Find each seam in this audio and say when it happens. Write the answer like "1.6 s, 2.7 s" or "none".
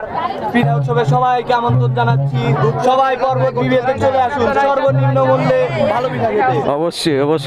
6.6 s

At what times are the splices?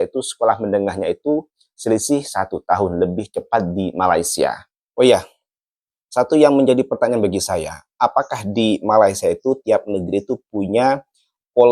none

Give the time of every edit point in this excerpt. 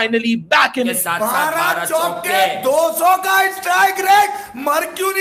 1.0 s

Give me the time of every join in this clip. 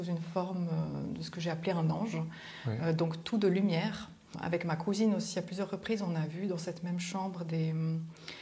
4.3 s

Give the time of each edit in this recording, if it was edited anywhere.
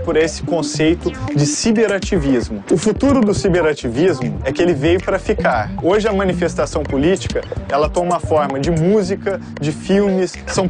2.6 s, 5.7 s

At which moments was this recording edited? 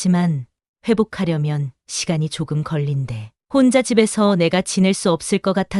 none

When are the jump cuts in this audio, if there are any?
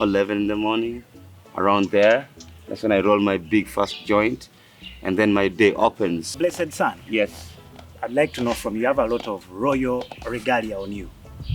6.3 s

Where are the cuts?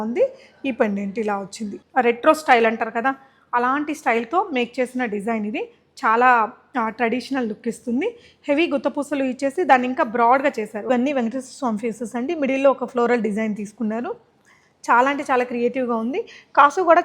1.8 s, 10.8 s

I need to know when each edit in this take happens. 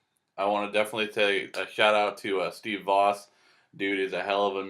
3.8 s

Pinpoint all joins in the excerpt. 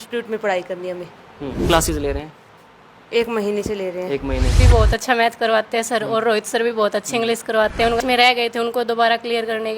1.7 s, 4.6 s, 8.0 s

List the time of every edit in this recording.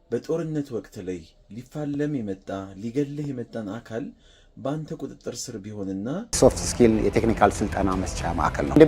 6.4 s

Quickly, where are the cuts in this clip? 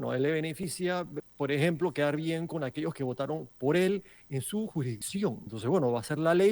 1.1 s, 5.0 s

